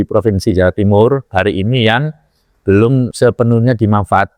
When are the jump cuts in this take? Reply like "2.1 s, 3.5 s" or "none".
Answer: 3.1 s